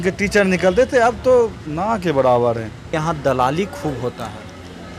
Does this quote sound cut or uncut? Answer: cut